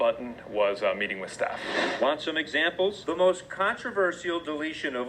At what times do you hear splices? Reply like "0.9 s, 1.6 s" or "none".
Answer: 3.0 s